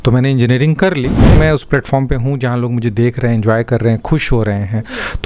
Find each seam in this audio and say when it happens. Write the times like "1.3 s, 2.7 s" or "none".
1.3 s